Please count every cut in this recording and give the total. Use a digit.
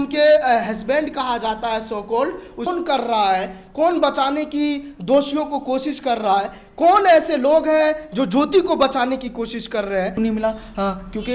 2